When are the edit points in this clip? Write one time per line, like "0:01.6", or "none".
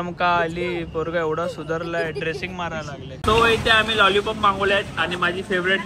0:03.2